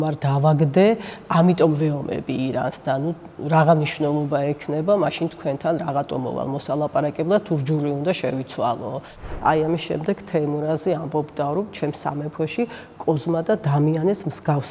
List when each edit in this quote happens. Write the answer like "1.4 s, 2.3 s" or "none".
9.3 s